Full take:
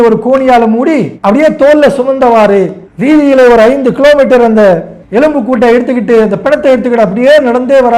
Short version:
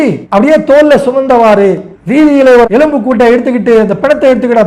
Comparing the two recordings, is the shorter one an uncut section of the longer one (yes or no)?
no